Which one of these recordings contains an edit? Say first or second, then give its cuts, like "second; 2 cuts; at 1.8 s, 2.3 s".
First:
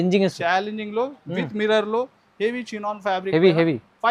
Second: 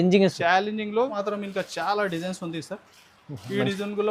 second; 1 cut; at 1.2 s